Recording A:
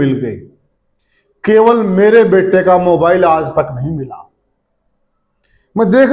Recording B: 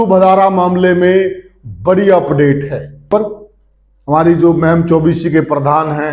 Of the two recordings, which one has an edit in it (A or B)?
B